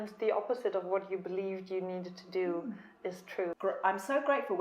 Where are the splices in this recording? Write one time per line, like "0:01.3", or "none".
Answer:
0:03.5